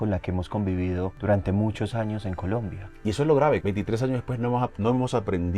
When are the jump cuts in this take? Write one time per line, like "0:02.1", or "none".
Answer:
0:01.2
0:03.6